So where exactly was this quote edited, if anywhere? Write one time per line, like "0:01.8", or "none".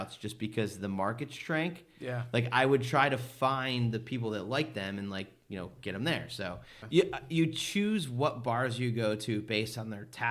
0:06.7